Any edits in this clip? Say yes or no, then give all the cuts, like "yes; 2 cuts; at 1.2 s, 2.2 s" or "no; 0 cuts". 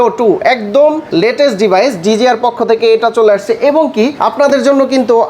yes; 2 cuts; at 1.0 s, 4.2 s